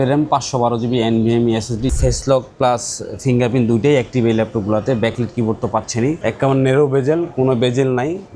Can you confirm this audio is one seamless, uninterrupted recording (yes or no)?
no